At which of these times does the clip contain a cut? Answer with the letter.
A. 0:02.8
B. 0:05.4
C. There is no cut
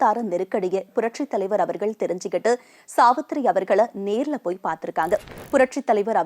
B